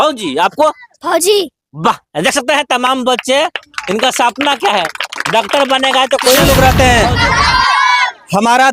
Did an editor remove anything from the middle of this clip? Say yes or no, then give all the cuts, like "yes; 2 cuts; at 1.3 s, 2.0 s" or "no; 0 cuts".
yes; 1 cut; at 6.4 s